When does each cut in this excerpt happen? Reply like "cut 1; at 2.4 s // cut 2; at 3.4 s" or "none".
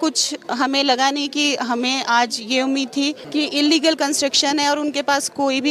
cut 1; at 3.2 s